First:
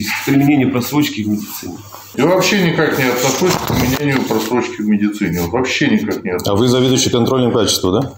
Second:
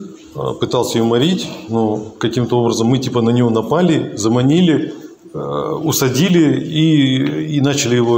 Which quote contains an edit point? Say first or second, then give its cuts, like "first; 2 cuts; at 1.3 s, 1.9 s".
first; 1 cut; at 2.0 s